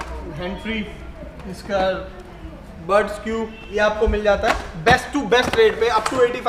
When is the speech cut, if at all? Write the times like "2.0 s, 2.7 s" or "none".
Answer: 3.6 s